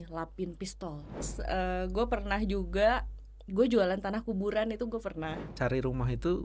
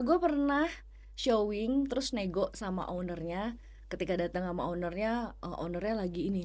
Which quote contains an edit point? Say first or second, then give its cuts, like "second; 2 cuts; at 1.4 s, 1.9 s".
first; 2 cuts; at 1.3 s, 5.4 s